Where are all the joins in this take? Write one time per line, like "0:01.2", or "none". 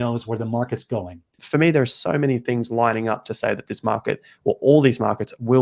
0:01.3